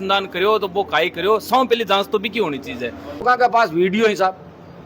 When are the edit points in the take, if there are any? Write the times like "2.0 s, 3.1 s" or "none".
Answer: 3.2 s